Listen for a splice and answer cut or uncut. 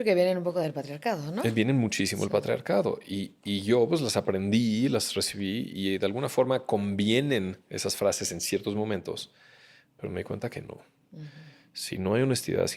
uncut